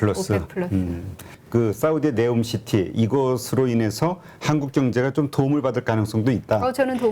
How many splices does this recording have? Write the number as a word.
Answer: one